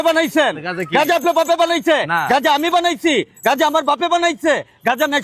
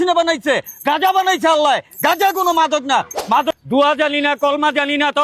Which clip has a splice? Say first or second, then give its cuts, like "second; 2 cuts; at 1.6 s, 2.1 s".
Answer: second; 1 cut; at 3.5 s